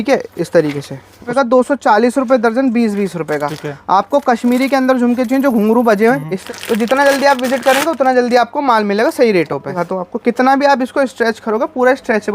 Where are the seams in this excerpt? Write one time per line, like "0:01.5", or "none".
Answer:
0:01.3
0:06.4
0:09.8